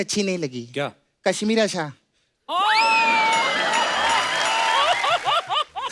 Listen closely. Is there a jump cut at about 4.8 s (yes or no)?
yes